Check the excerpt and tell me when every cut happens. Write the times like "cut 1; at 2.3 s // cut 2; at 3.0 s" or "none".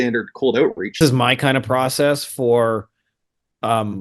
cut 1; at 1.0 s